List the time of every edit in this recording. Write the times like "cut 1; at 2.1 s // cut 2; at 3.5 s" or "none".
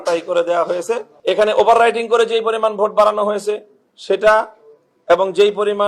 cut 1; at 1.1 s